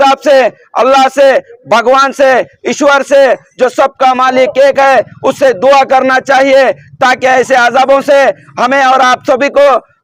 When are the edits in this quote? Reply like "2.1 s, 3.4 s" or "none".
none